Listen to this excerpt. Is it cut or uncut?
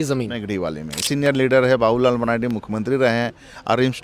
cut